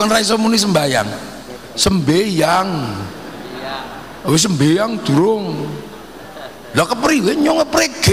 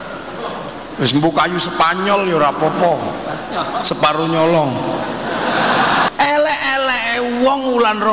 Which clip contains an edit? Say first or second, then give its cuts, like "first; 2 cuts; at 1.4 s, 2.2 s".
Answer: second; 1 cut; at 6.1 s